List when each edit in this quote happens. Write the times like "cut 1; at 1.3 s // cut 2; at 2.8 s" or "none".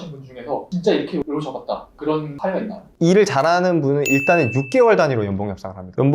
none